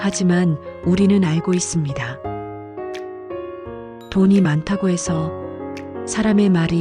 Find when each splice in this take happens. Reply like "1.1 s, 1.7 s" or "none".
none